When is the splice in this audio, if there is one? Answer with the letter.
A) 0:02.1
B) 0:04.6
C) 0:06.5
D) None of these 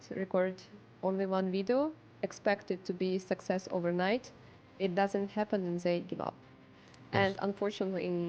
C